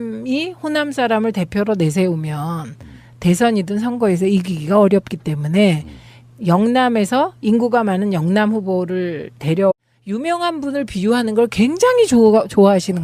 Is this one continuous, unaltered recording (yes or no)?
yes